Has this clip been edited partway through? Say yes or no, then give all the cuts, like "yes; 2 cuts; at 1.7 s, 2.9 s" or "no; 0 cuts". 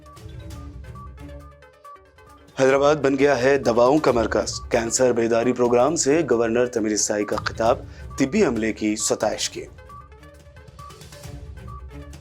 yes; 1 cut; at 1.1 s